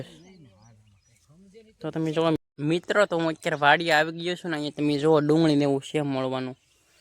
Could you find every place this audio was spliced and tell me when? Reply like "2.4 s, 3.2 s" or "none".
2.4 s